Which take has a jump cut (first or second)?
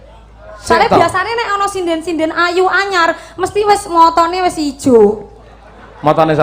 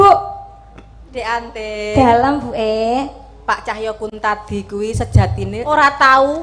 second